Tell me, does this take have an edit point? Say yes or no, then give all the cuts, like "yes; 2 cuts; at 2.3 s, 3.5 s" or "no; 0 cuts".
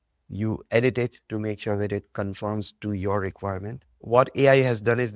yes; 1 cut; at 4.0 s